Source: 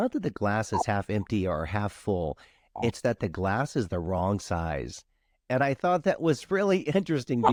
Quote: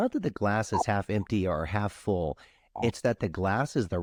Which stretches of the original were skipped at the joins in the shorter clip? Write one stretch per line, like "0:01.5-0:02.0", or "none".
none